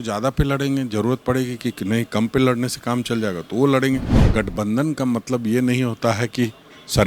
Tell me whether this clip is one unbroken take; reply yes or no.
no